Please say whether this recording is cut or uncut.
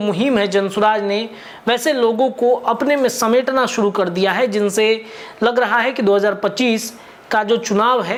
uncut